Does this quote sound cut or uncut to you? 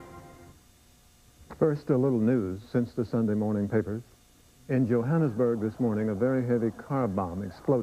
uncut